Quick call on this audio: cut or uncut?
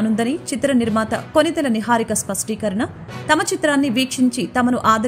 uncut